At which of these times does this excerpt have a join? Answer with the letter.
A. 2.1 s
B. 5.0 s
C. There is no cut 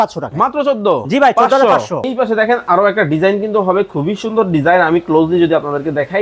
A